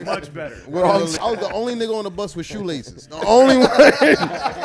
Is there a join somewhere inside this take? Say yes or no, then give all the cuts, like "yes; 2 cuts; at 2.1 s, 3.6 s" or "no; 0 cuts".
yes; 1 cut; at 1.1 s